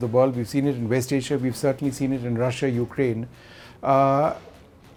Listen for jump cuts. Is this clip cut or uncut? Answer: uncut